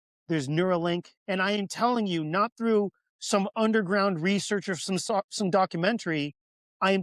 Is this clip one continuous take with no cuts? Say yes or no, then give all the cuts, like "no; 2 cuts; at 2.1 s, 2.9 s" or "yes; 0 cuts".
no; 1 cut; at 1.1 s